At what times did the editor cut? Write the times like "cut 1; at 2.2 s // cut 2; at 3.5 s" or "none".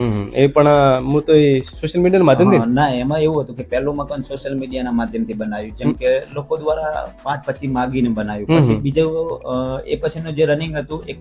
none